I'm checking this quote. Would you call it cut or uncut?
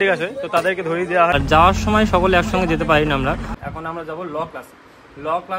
cut